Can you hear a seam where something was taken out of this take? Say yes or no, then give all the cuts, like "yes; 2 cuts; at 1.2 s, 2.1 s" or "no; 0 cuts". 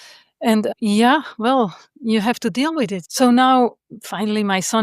yes; 2 cuts; at 3.0 s, 3.9 s